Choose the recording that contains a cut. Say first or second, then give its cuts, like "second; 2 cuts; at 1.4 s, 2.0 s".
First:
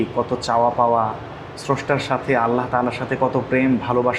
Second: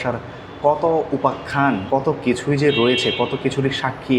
second; 1 cut; at 1.8 s